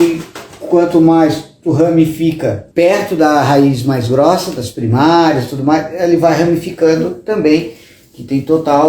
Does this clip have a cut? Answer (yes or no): yes